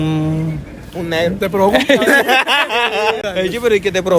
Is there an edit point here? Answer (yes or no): yes